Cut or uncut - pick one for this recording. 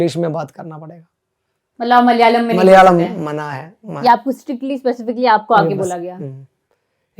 uncut